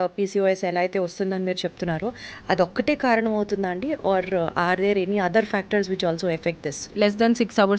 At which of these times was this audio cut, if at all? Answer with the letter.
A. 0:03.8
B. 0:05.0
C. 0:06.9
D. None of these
C